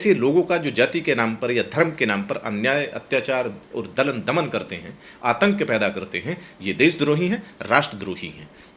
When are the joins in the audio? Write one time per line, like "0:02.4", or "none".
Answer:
none